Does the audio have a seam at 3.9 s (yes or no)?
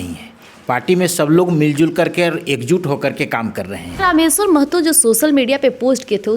yes